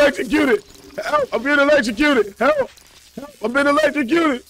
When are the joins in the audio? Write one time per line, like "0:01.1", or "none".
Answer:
none